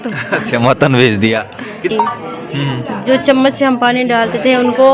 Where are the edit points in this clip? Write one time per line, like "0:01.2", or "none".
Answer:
0:01.9